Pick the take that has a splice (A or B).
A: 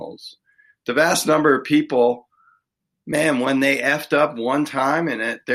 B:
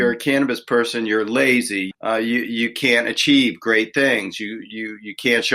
B